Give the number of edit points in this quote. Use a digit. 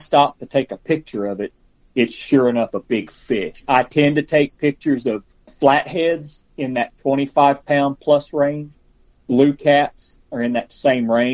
3